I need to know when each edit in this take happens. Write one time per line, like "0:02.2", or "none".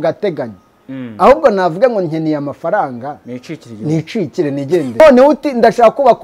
0:05.0